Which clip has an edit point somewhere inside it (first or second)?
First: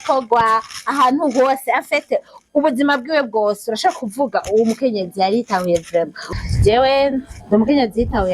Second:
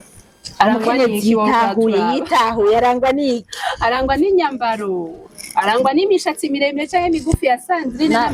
first